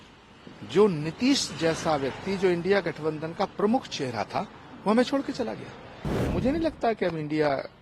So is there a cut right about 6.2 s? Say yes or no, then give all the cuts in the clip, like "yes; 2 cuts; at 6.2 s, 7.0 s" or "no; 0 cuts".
yes; 1 cut; at 6.2 s